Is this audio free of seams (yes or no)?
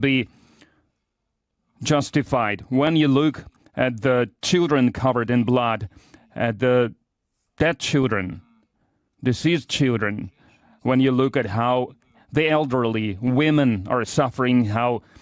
yes